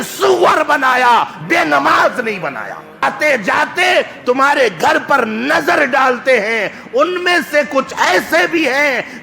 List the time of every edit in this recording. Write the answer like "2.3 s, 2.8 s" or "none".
3.0 s